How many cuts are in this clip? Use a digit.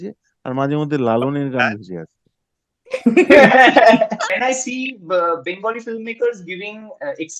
1